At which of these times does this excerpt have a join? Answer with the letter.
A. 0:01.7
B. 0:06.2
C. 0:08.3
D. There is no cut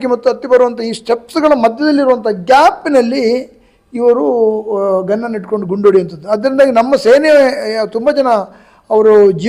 D